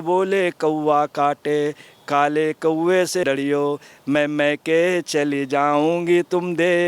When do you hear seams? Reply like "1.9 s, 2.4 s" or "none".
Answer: none